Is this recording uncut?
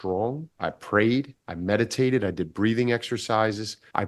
no; 1 cut; at 1.4 s

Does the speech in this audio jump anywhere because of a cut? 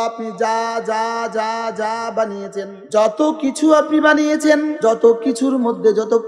yes; 2 cuts; at 2.8 s, 4.8 s

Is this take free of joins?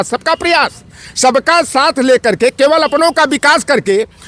yes; 0 cuts

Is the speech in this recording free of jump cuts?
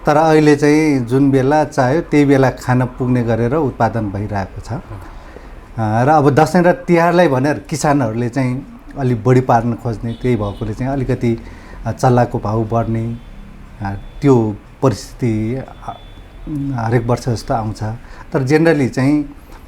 yes; 0 cuts

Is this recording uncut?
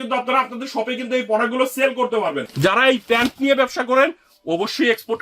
no; 1 cut; at 2.5 s

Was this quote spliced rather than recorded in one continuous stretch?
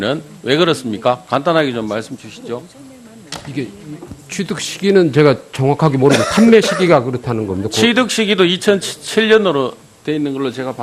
no; 0 cuts

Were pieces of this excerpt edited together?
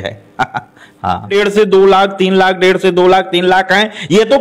yes; 1 cut; at 1.3 s

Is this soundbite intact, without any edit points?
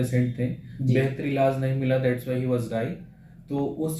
yes; 0 cuts

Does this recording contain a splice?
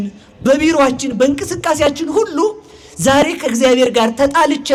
no; 0 cuts

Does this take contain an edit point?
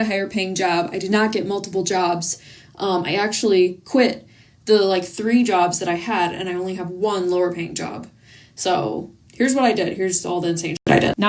no; 0 cuts

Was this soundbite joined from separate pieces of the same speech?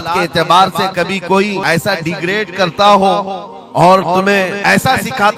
yes; 2 cuts; at 1.6 s, 4.6 s

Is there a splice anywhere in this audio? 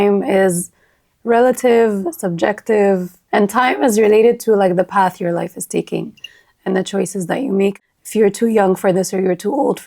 yes; 2 cuts; at 3.1 s, 7.8 s

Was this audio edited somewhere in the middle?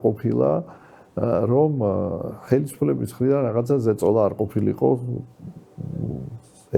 no; 0 cuts

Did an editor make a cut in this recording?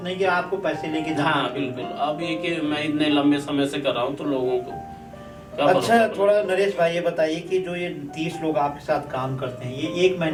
no; 0 cuts

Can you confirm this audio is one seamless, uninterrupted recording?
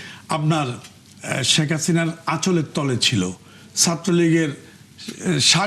yes; 0 cuts

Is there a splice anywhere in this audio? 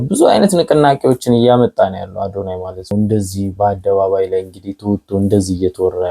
yes; 1 cut; at 2.9 s

